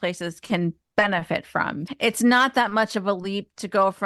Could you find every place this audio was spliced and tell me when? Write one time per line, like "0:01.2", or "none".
0:01.8